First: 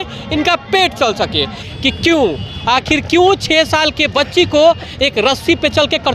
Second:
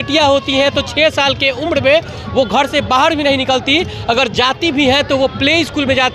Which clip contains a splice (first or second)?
first